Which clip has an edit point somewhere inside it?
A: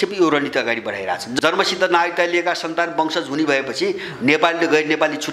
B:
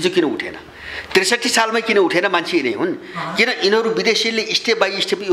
A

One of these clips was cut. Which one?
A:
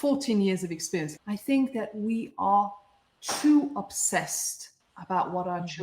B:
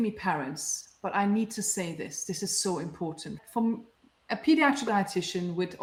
A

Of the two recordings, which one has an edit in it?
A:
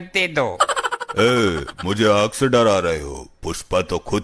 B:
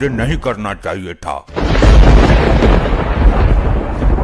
B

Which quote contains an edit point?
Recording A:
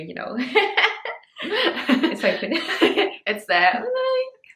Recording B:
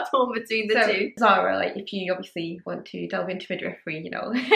B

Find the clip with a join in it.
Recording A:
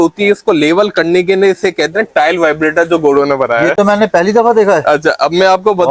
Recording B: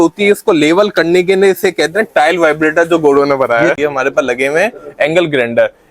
B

